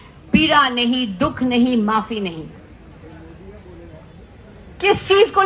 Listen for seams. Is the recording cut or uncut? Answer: uncut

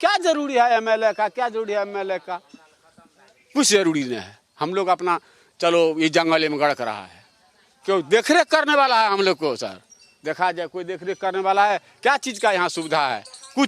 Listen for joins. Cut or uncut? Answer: uncut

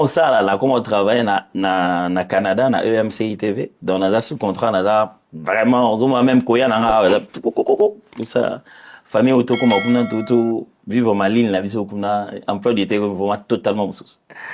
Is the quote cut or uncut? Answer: uncut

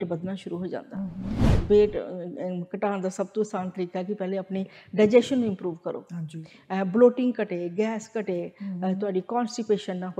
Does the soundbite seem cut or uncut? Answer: cut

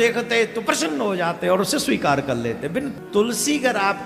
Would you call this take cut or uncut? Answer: cut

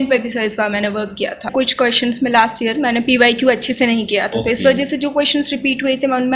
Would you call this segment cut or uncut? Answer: cut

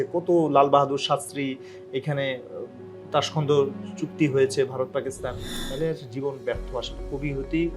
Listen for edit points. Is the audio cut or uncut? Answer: cut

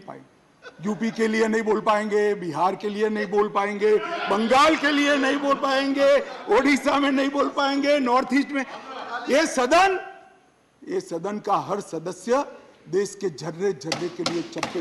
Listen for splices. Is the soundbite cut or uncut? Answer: uncut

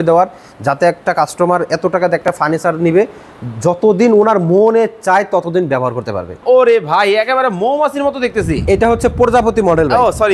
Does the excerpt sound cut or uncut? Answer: cut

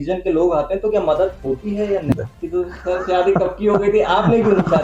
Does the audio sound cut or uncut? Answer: cut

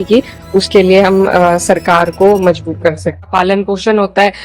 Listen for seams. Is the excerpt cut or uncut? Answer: cut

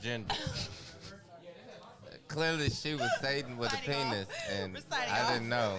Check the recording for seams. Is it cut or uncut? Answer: uncut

